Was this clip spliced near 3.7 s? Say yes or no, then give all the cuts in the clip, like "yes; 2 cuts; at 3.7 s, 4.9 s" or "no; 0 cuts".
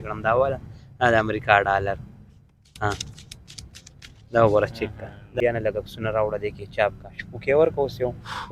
no; 1 cut; at 5.3 s